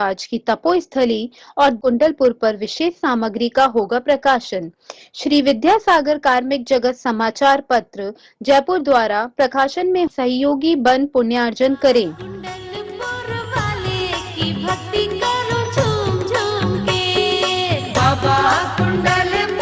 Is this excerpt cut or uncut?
cut